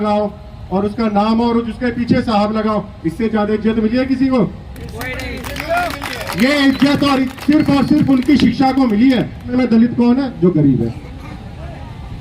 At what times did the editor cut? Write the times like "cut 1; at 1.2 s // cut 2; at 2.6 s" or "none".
cut 1; at 9.5 s